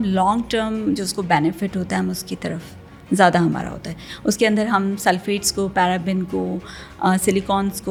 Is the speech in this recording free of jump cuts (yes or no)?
yes